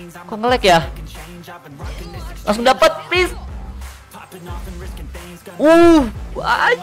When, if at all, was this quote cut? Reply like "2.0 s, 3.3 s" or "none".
0.9 s, 2.4 s